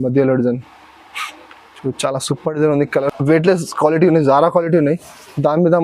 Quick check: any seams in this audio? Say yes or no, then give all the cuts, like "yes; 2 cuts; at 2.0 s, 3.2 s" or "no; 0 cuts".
yes; 1 cut; at 3.1 s